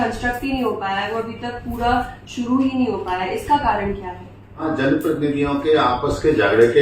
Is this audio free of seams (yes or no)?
no